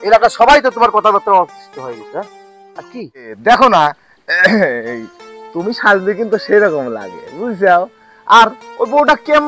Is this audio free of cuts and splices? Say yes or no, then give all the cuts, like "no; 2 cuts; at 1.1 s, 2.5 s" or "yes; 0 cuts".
no; 1 cut; at 3.3 s